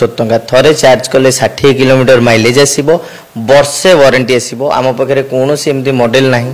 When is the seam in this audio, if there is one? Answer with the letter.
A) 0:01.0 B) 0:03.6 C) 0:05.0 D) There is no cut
D